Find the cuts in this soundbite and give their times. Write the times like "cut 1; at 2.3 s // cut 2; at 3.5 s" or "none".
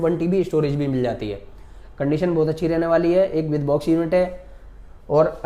none